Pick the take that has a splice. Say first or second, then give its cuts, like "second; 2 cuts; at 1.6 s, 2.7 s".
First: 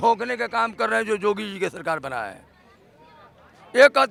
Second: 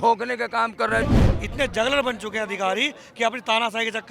second; 1 cut; at 1.0 s